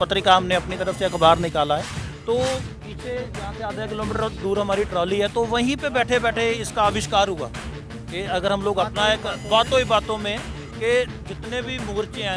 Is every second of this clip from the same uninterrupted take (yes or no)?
no